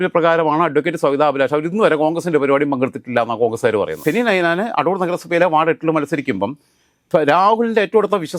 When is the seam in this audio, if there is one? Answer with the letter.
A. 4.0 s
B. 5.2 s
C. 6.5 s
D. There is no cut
A